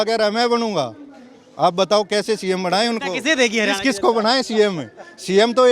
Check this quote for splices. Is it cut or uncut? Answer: uncut